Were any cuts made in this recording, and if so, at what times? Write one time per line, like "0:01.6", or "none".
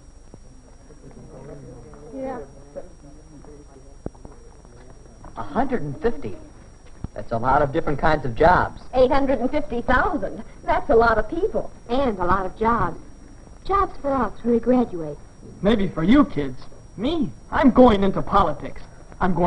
0:08.0